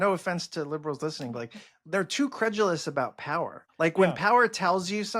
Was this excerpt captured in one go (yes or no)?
no